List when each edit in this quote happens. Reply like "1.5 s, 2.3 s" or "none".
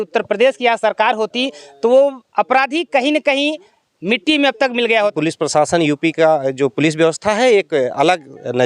5.1 s